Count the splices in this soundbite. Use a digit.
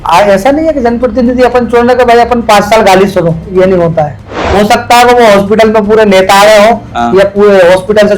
1